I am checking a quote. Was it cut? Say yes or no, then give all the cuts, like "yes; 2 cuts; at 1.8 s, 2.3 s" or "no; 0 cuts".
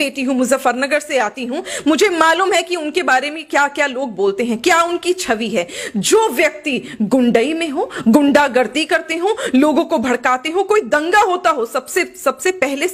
no; 0 cuts